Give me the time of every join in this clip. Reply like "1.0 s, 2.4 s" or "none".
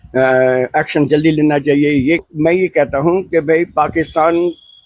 2.2 s